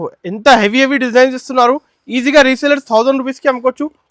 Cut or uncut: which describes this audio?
uncut